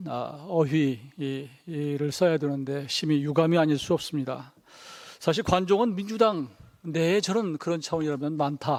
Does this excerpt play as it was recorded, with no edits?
yes; 0 cuts

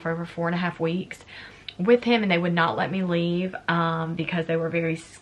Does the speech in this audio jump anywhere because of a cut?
no; 0 cuts

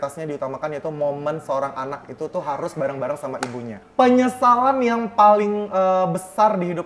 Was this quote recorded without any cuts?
no; 1 cut; at 3.8 s

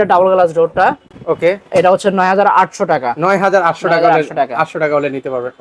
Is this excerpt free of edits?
yes; 0 cuts

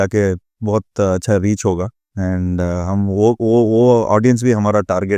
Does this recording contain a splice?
yes; 1 cut; at 2.0 s

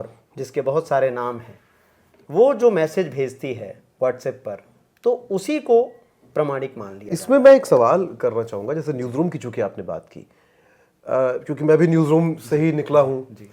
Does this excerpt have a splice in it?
yes; 1 cut; at 6.9 s

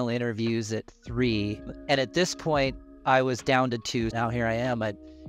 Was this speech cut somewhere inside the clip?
yes; 1 cut; at 4.1 s

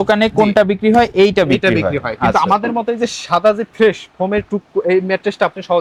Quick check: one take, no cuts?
yes; 0 cuts

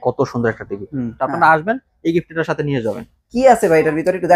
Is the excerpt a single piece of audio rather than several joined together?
no; 1 cut; at 1.2 s

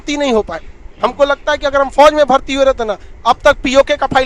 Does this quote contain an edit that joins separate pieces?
no; 0 cuts

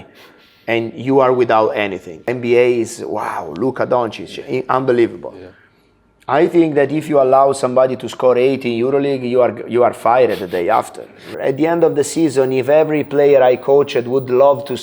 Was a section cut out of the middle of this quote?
yes; 2 cuts; at 2.3 s, 11.3 s

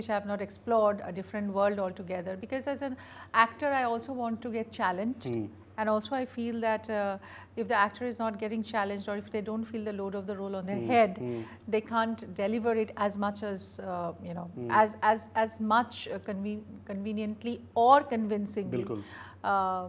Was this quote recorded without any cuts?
yes; 0 cuts

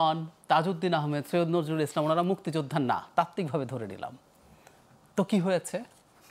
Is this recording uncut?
yes; 0 cuts

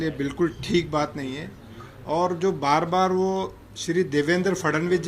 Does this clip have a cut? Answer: no; 0 cuts

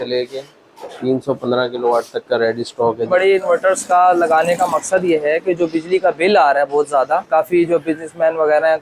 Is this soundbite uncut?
no; 2 cuts; at 3.1 s, 7.3 s

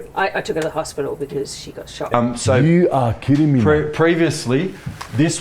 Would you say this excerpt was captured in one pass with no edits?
no; 1 cut; at 2.1 s

